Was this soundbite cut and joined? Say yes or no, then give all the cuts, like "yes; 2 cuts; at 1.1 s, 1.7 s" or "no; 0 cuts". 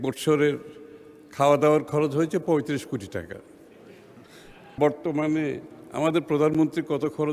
yes; 1 cut; at 4.8 s